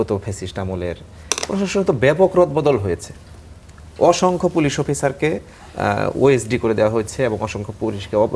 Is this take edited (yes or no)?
no